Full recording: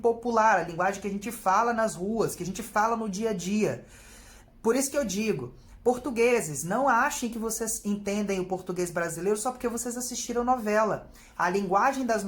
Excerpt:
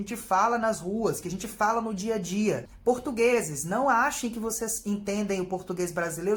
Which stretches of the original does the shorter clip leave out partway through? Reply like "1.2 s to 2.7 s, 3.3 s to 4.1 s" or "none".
3.8 s to 5.7 s